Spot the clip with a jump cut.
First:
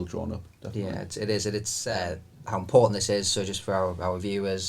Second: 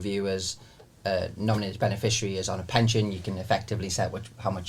first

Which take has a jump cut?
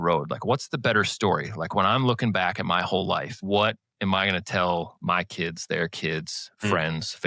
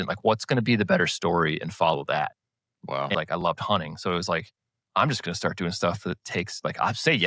second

